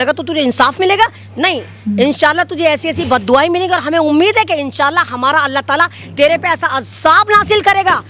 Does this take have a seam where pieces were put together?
no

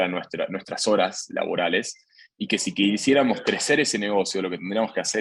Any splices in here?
no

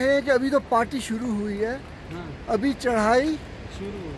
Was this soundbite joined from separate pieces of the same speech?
no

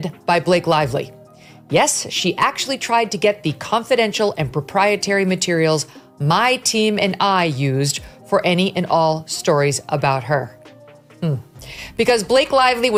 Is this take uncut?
yes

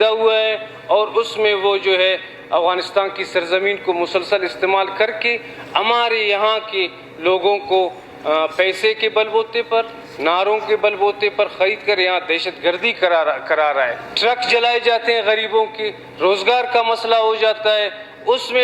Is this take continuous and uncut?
no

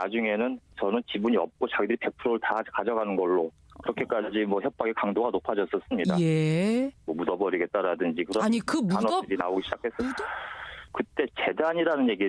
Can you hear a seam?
no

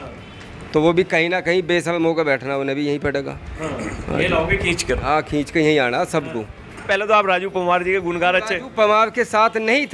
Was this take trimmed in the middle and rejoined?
yes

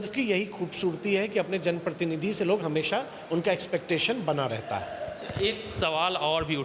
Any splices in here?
no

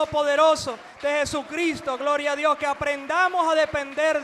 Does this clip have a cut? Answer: no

